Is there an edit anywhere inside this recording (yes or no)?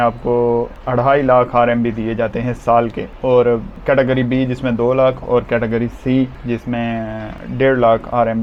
no